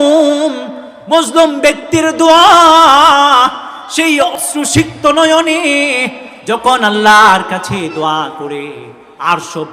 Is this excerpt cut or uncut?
cut